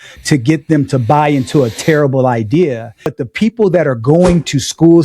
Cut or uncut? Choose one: cut